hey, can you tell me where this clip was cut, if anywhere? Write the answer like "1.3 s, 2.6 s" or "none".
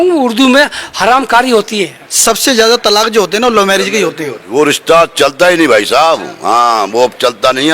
2.0 s, 4.4 s